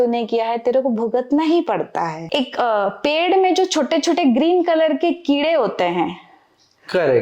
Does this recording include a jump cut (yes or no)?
yes